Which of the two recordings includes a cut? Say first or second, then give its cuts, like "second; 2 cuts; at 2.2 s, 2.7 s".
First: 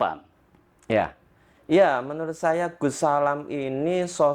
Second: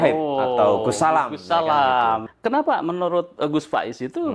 second; 1 cut; at 2.3 s